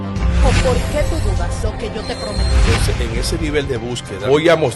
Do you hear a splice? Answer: no; 0 cuts

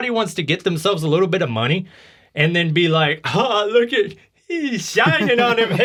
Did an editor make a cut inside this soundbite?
no; 0 cuts

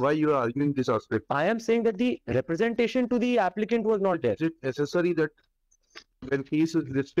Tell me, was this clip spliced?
no; 0 cuts

